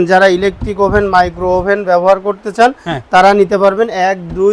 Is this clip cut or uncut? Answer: uncut